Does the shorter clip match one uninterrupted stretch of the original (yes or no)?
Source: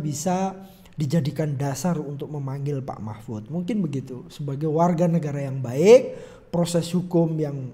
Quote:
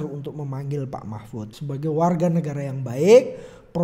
no